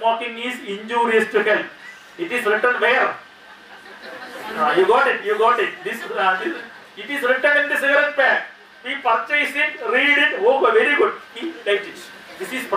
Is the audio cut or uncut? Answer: uncut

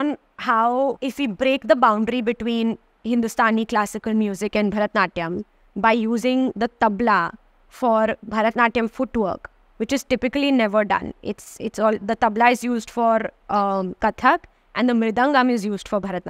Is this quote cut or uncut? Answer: cut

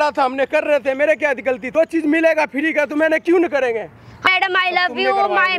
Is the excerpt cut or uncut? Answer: cut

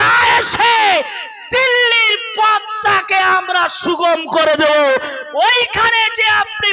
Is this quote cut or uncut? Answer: uncut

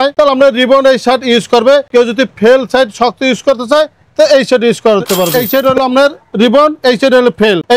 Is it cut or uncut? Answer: cut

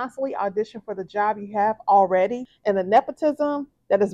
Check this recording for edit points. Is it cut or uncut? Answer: cut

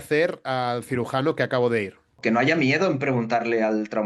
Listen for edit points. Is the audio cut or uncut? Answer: cut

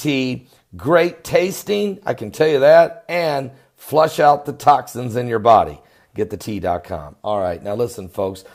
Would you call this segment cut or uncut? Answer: uncut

